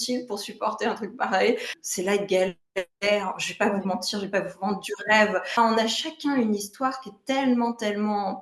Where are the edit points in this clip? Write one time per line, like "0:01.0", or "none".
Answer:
0:01.7
0:05.6